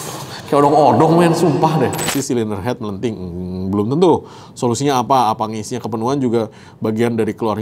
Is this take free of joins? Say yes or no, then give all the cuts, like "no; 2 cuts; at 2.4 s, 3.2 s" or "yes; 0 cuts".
no; 1 cut; at 2.1 s